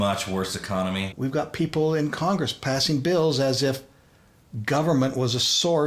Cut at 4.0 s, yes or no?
no